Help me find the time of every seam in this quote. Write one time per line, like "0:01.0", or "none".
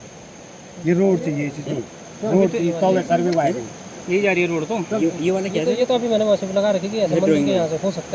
none